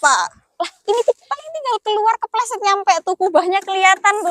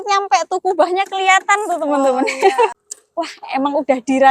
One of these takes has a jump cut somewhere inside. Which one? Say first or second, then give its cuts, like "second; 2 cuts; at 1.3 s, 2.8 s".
second; 1 cut; at 2.8 s